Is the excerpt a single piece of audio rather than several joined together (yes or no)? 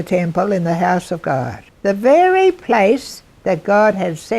no